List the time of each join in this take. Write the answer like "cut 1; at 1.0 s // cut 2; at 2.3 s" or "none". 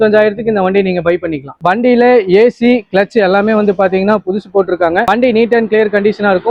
cut 1; at 1.6 s